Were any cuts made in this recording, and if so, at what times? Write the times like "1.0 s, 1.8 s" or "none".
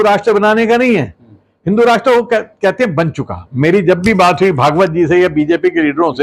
none